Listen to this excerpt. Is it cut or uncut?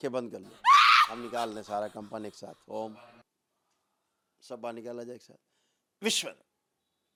uncut